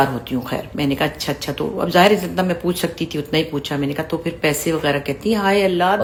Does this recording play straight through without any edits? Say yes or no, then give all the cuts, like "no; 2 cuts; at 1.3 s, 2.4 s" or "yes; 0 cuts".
yes; 0 cuts